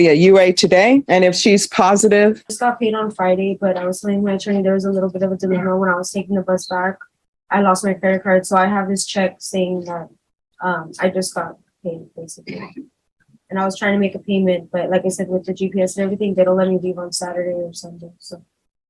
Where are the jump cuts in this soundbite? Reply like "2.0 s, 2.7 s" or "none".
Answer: 1.1 s, 2.5 s